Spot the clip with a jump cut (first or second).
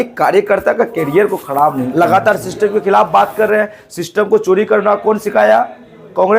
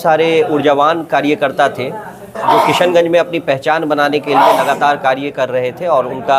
first